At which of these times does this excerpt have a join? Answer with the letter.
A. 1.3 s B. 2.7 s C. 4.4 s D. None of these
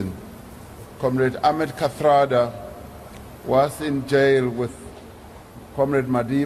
C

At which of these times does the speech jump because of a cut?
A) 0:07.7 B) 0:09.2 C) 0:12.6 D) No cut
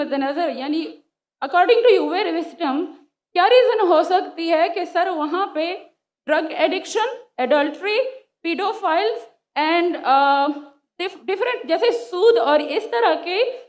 D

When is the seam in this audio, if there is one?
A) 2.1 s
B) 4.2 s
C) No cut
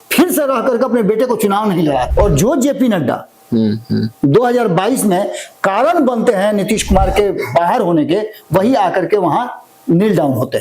A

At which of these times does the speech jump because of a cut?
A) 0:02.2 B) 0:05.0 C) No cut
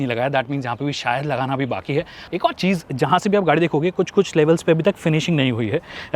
A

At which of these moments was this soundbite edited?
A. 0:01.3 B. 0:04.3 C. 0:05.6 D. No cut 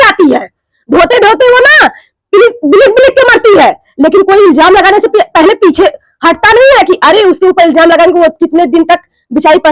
D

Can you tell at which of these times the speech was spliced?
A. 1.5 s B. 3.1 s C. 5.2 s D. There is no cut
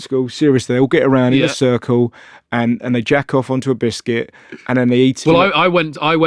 C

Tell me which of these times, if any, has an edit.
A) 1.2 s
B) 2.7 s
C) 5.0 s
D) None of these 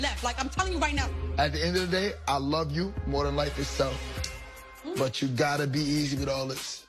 B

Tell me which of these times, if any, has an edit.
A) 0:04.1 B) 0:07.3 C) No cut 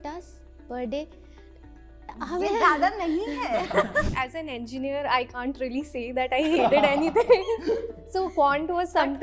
A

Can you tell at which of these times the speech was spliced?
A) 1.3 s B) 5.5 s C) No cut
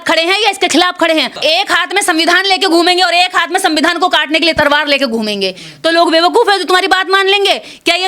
A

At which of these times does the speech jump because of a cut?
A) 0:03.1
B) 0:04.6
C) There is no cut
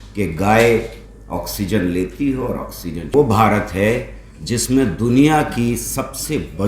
A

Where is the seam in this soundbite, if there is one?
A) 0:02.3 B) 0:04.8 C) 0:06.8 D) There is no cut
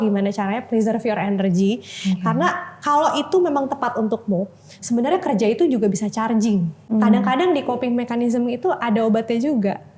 C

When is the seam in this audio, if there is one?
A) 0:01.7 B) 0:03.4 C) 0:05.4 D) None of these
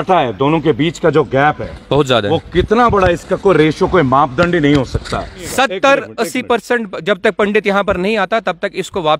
C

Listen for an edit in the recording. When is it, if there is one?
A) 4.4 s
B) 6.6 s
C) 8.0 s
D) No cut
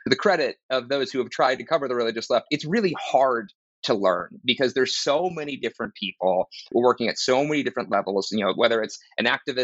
D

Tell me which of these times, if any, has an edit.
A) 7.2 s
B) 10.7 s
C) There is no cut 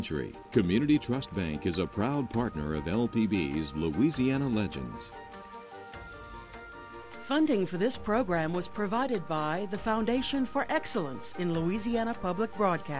A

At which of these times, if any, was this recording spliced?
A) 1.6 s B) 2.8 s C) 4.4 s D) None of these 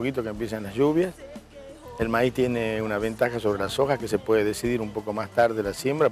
D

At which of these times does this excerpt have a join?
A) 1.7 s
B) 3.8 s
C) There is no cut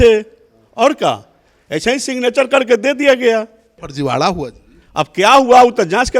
B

